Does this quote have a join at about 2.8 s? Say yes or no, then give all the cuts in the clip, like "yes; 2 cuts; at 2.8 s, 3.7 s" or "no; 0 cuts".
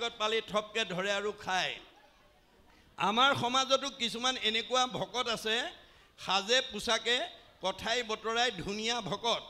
no; 0 cuts